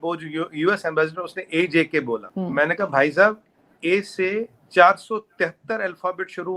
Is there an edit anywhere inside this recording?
yes; 1 cut; at 2.3 s

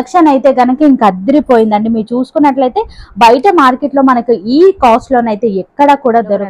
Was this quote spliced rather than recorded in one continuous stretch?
no; 0 cuts

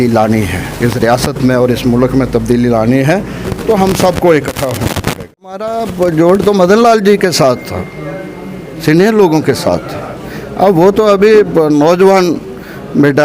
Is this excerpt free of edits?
no; 1 cut; at 5.6 s

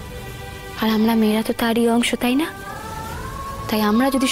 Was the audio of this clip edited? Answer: no; 0 cuts

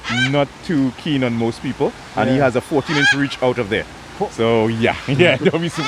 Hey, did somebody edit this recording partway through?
no; 0 cuts

